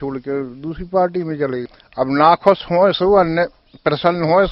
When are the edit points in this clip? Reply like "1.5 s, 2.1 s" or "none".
1.7 s